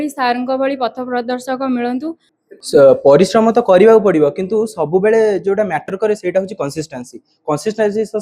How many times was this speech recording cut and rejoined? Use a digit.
1